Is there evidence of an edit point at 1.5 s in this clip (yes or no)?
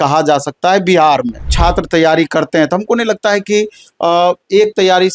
yes